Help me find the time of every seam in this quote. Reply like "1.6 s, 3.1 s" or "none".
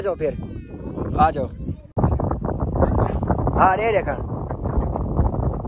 1.8 s

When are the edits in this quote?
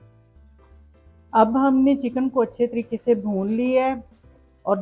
1.3 s

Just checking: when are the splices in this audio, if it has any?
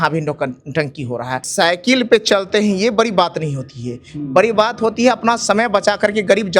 1.4 s

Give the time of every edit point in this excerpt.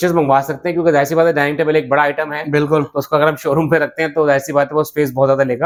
none

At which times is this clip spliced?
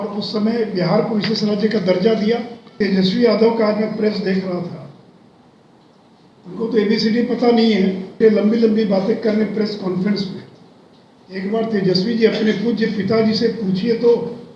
2.8 s, 8.2 s

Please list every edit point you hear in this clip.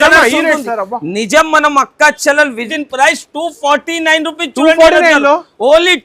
2.7 s

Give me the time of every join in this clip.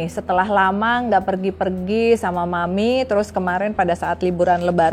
none

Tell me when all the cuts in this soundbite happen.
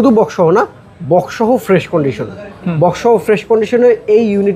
none

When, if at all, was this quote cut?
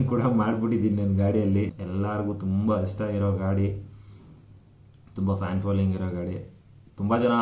1.7 s

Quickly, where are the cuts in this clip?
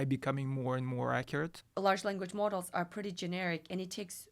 1.6 s

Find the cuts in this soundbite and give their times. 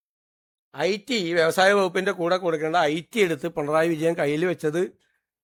none

